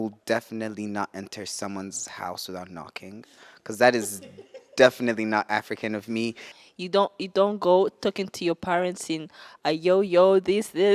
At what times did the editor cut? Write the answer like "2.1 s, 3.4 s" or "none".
6.5 s